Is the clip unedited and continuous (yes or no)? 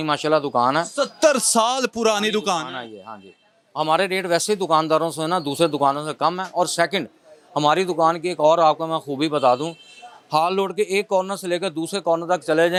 yes